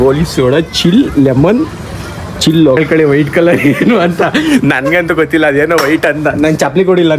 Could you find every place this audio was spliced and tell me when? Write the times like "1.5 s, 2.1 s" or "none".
2.8 s